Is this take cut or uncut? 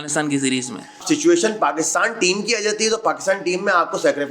cut